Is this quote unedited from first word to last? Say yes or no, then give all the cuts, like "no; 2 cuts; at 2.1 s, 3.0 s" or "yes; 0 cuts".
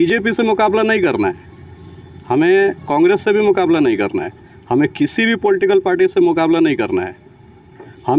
yes; 0 cuts